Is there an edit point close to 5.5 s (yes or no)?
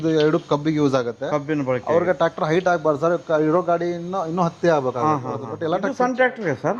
yes